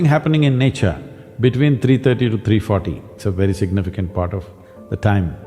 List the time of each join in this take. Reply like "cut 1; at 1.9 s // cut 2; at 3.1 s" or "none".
cut 1; at 3.1 s